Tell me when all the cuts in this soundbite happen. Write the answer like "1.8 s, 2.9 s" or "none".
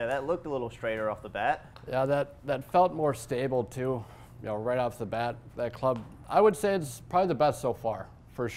1.7 s, 6.2 s

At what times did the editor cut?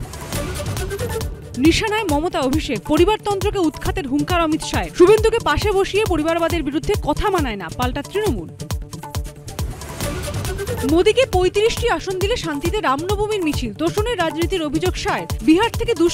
1.4 s

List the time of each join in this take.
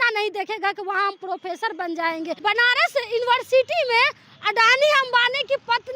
2.3 s

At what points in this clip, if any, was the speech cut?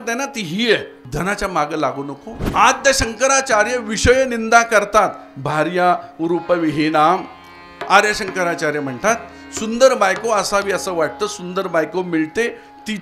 1.0 s, 2.3 s

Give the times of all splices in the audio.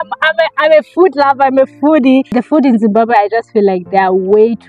2.4 s

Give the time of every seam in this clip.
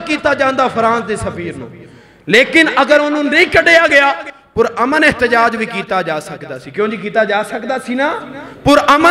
none

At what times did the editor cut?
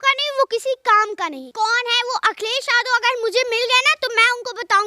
1.4 s

